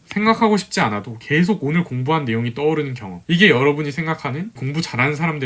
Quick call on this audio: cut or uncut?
uncut